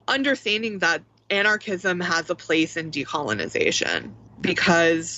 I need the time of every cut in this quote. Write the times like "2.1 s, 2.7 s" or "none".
none